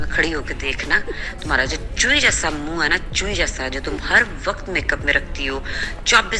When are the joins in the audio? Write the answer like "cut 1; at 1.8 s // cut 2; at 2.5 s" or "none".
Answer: none